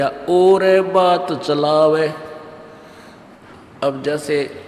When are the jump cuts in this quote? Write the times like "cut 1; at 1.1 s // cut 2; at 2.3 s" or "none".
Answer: cut 1; at 3.4 s